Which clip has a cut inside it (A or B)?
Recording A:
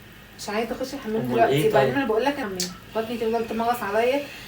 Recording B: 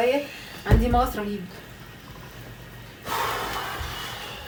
A